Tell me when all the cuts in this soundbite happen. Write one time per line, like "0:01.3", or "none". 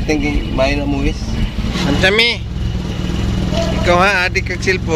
0:01.7